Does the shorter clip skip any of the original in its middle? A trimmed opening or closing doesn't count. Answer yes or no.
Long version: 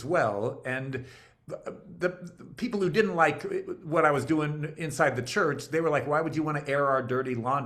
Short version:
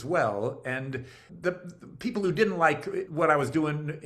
yes